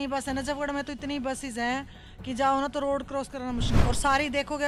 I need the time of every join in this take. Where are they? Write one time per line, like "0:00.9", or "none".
none